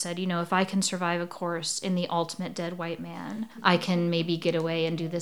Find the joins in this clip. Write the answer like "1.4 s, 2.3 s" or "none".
none